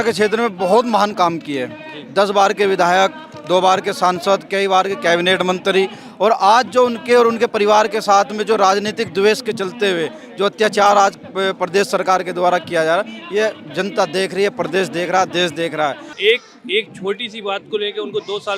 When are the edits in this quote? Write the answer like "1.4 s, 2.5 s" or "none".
16.1 s